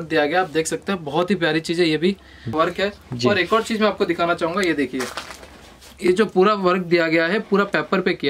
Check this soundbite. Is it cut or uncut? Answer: cut